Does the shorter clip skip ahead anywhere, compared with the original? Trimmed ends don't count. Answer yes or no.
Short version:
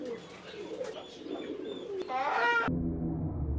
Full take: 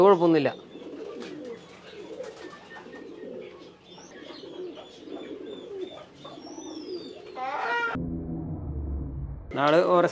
yes